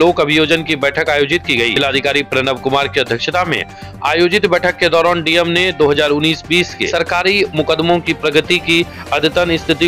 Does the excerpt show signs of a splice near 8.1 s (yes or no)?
no